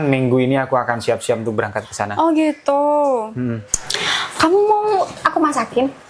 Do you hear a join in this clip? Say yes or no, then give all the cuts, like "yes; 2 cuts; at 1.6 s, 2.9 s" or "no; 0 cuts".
no; 0 cuts